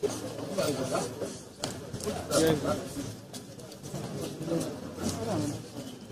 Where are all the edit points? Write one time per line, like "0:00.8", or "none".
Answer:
none